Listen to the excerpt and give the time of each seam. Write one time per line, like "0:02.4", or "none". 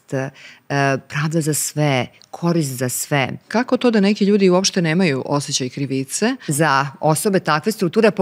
0:03.4
0:06.5